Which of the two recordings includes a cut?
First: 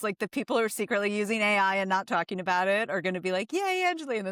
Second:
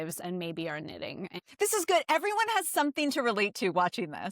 second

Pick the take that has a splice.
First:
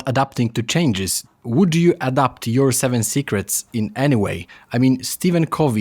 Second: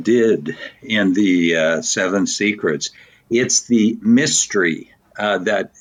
first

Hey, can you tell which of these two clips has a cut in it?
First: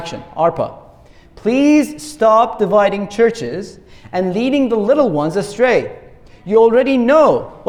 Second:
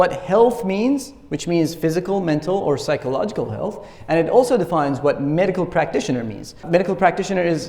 second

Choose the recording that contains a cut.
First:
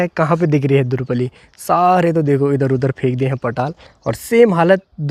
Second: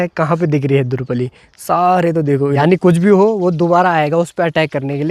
second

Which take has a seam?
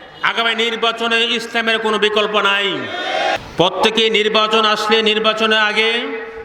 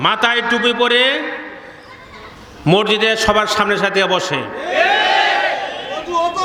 first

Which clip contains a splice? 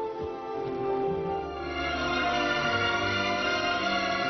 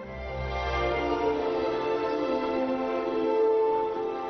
second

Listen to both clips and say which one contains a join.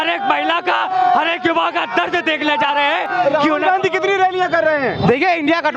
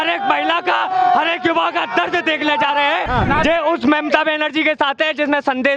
second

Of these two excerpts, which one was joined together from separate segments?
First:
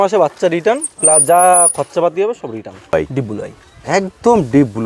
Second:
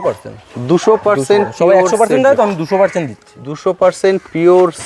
first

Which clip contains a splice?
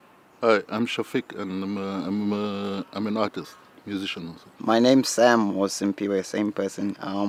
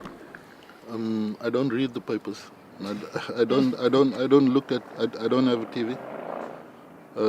second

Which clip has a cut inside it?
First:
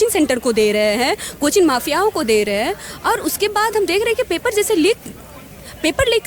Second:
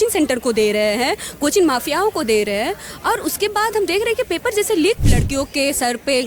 second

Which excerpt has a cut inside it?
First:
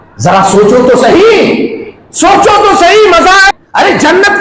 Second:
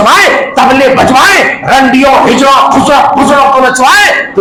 first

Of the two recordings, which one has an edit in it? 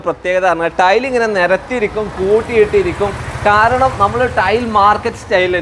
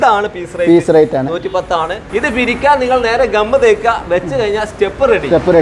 second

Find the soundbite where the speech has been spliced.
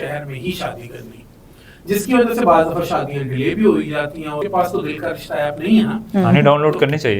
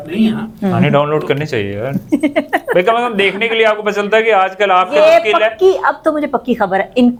first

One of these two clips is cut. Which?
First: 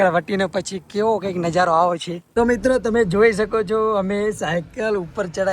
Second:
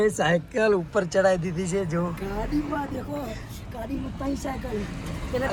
first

